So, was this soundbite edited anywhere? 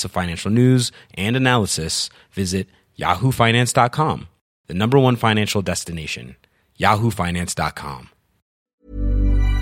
yes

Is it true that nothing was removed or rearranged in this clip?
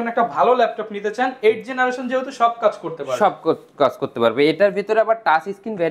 yes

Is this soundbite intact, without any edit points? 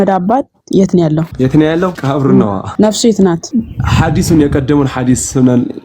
no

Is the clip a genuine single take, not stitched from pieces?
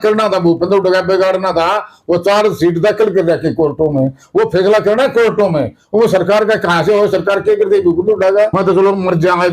no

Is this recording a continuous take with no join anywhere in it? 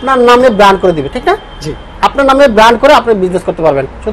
yes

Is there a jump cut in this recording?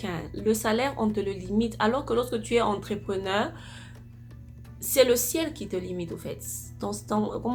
no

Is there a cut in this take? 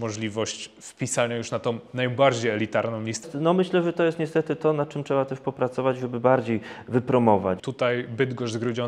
yes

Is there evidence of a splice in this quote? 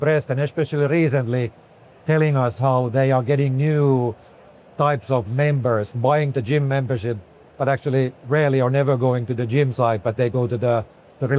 no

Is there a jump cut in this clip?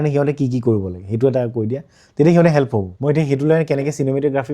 yes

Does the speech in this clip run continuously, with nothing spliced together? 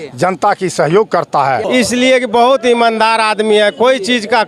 no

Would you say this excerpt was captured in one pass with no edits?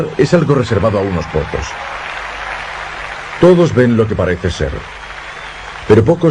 yes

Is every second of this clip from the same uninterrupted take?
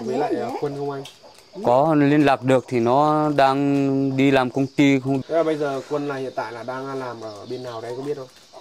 no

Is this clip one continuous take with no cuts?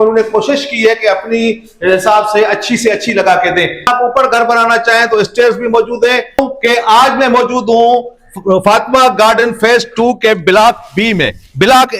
no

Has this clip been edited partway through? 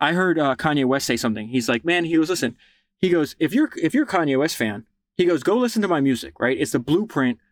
no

